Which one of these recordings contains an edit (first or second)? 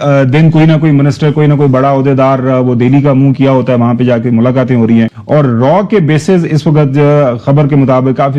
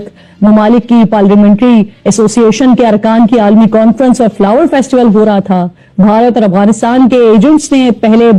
first